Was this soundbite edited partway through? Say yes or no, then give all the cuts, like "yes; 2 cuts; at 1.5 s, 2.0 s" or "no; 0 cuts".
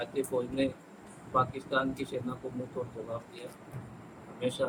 no; 0 cuts